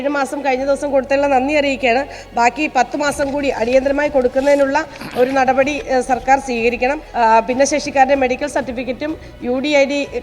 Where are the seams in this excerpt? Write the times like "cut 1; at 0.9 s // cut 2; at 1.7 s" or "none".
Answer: cut 1; at 7.0 s